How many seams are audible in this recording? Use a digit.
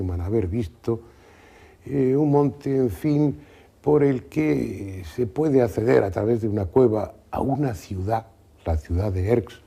0